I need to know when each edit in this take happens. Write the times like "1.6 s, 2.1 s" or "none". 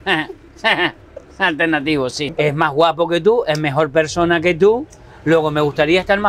2.2 s